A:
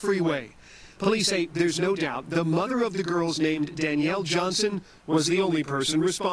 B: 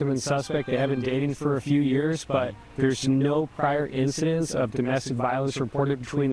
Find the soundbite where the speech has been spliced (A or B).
B